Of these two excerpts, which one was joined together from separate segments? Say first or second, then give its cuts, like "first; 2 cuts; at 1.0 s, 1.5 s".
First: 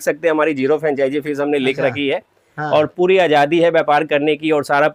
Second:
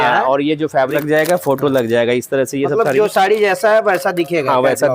second; 1 cut; at 0.9 s